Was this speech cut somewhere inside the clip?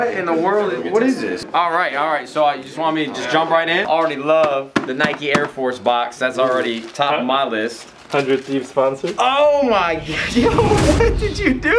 yes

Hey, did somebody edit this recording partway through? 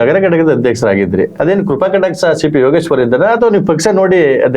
yes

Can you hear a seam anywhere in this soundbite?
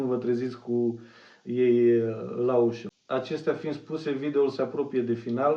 no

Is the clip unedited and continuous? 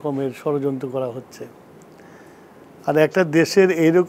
yes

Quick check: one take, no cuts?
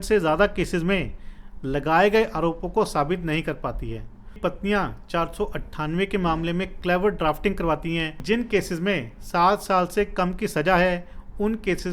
no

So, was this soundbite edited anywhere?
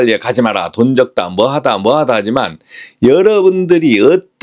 no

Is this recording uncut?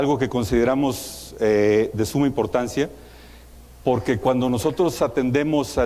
yes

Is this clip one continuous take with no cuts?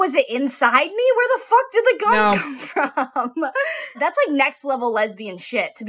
no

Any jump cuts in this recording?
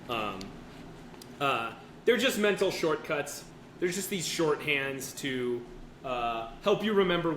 yes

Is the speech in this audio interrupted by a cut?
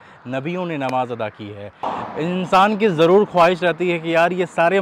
yes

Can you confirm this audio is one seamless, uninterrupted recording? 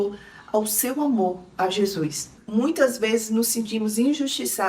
no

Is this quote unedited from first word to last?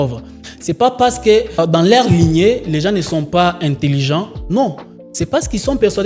no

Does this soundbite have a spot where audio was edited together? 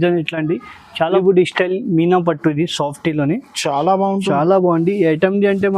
yes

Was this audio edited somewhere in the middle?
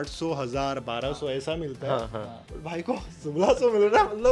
no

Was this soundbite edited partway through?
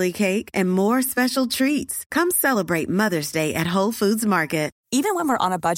yes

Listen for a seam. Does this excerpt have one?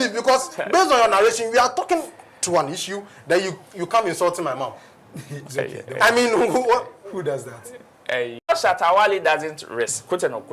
yes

